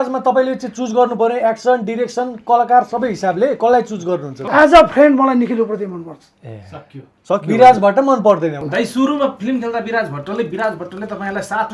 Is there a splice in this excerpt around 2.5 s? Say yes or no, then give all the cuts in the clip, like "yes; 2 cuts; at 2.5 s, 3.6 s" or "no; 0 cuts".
no; 2 cuts; at 4.4 s, 8.6 s